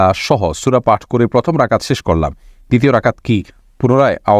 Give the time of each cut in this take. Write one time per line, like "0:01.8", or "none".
none